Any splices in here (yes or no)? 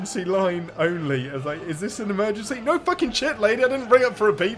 no